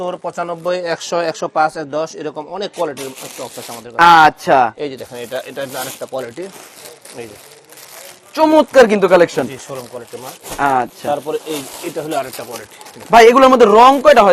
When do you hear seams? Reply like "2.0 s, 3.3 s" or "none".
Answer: none

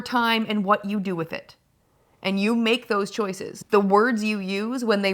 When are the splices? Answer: 3.5 s

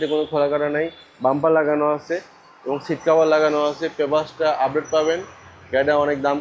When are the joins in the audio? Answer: none

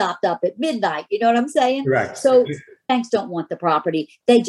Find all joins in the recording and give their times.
2.8 s

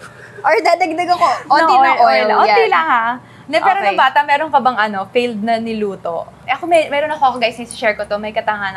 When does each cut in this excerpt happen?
none

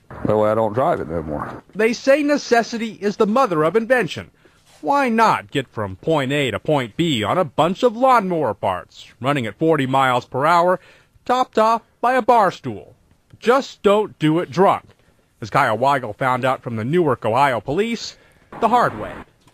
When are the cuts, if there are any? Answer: none

